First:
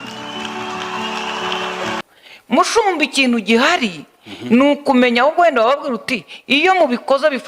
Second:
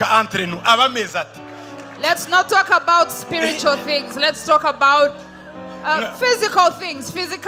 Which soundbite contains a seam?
first; 1 cut; at 2.0 s

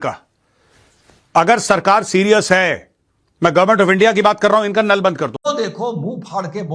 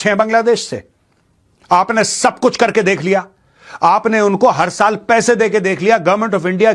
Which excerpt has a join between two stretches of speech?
first; 1 cut; at 5.5 s

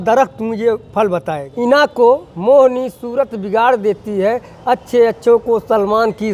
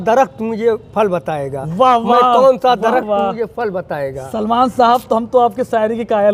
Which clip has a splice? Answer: first; 1 cut; at 1.4 s

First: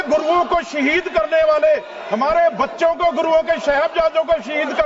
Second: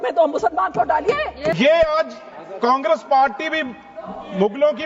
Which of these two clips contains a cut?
second; 1 cut; at 1.5 s

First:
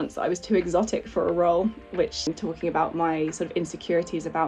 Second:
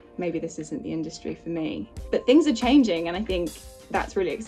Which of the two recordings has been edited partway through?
first; 1 cut; at 2.2 s

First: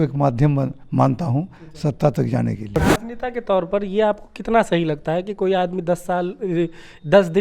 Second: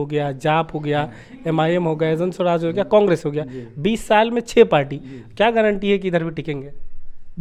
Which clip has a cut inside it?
first; 1 cut; at 2.8 s

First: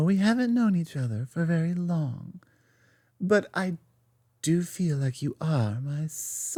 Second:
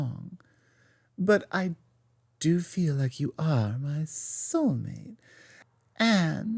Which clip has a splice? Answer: second; 1 cut; at 5.7 s

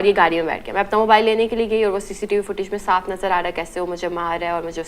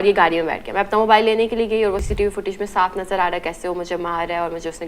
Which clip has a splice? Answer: second; 1 cut; at 2.1 s

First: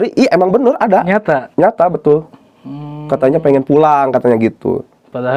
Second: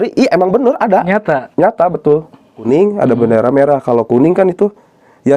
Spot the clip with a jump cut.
second; 1 cut; at 2.6 s

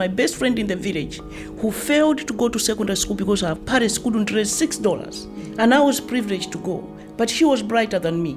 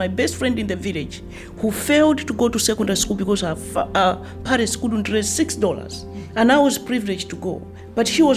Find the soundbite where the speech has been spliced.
first; 1 cut; at 3.6 s

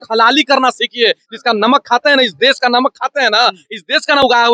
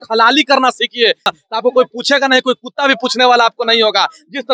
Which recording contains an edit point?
second; 1 cut; at 1.3 s

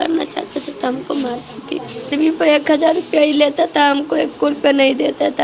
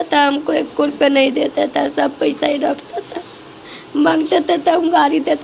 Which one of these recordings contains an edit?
first; 1 cut; at 2.1 s

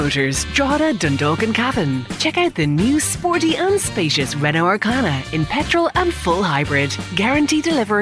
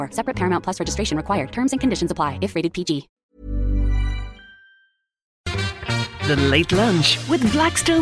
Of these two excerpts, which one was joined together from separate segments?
second; 1 cut; at 5.5 s

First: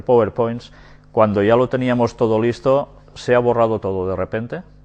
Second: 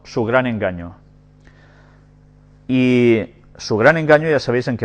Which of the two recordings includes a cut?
second; 1 cut; at 3.9 s

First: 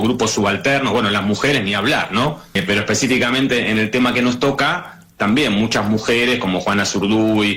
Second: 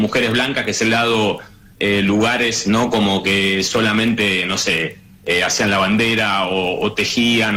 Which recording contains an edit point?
first; 1 cut; at 2.5 s

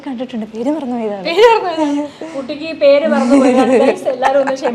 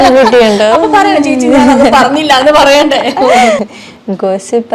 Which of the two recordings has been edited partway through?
second; 1 cut; at 3.6 s

